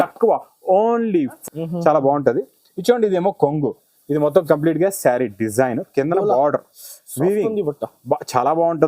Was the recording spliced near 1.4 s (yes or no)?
yes